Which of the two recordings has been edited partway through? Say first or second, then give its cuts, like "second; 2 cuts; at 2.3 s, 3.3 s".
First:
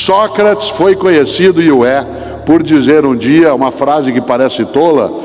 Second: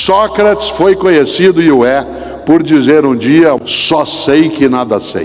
second; 1 cut; at 3.6 s